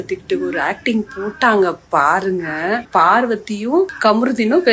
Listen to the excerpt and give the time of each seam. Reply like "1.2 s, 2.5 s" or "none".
2.8 s, 3.9 s